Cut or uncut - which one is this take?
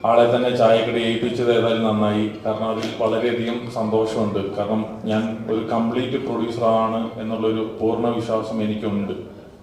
uncut